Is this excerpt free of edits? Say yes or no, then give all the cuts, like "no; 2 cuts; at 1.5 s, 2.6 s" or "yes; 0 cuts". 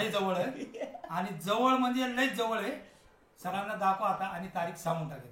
yes; 0 cuts